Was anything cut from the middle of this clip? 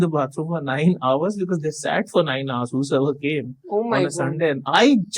no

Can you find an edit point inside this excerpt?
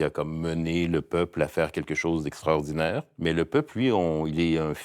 yes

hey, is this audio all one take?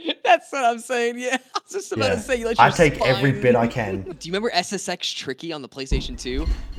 no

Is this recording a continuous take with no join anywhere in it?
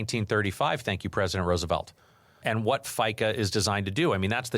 no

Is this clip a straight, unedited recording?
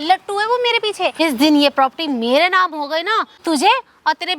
no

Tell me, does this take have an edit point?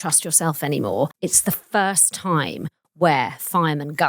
yes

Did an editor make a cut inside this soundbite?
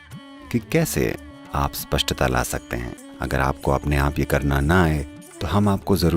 yes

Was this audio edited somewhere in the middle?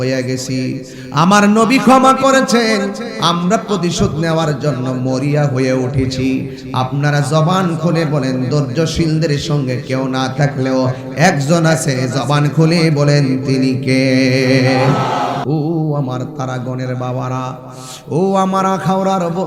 yes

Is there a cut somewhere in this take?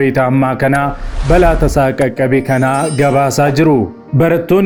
no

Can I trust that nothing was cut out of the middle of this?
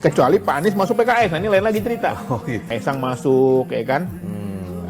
no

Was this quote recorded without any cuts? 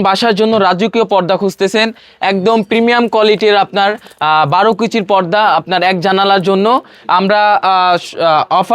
yes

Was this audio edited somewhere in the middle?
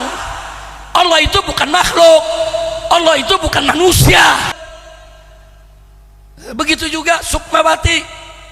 yes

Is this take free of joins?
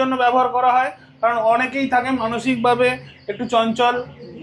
yes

